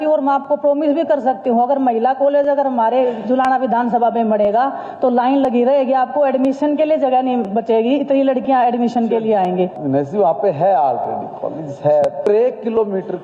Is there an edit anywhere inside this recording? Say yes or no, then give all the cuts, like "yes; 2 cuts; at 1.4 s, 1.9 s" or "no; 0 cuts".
yes; 2 cuts; at 9.8 s, 12.2 s